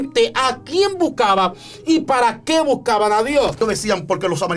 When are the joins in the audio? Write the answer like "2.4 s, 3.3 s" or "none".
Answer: 3.6 s